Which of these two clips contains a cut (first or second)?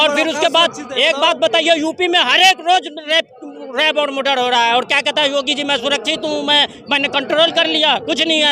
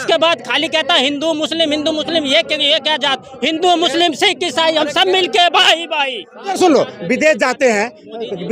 second